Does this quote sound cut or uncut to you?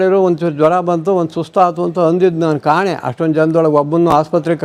uncut